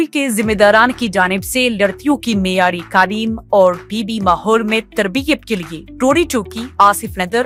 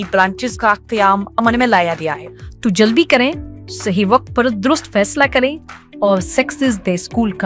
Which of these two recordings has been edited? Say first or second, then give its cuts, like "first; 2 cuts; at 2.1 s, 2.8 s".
second; 1 cut; at 2.2 s